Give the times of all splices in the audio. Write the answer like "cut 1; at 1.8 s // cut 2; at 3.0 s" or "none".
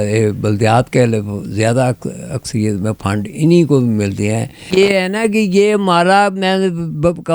cut 1; at 4.6 s